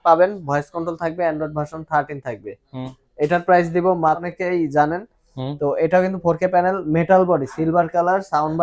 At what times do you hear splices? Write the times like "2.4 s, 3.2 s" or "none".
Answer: 4.3 s